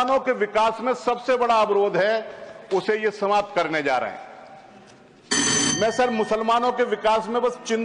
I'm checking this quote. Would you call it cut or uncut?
uncut